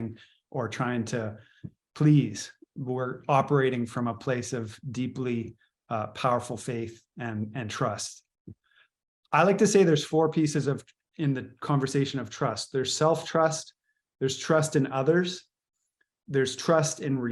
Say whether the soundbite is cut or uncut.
uncut